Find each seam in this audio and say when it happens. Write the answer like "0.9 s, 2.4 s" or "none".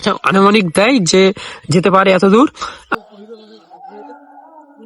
3.0 s